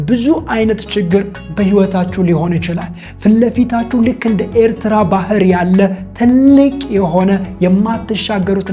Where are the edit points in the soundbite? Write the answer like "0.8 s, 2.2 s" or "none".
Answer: none